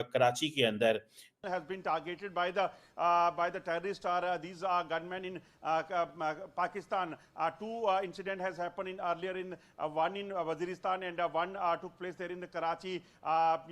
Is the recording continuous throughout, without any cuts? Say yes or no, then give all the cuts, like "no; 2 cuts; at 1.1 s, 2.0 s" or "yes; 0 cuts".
no; 1 cut; at 1.4 s